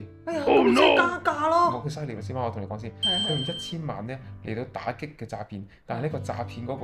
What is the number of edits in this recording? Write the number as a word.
one